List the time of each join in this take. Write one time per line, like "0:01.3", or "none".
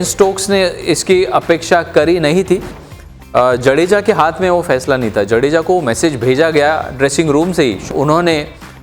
0:02.8
0:07.9